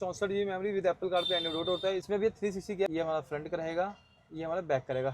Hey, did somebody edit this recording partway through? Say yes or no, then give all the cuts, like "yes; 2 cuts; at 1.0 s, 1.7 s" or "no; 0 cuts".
yes; 2 cuts; at 2.1 s, 2.9 s